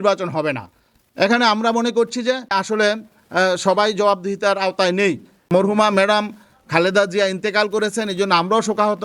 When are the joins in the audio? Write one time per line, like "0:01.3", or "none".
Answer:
0:02.6
0:05.4